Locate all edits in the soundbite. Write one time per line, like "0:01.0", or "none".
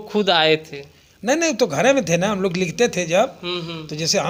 none